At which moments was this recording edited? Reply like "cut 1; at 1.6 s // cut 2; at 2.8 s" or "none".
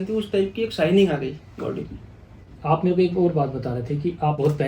none